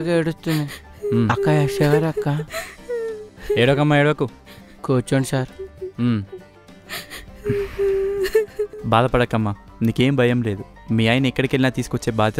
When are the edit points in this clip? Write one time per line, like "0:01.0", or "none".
0:03.8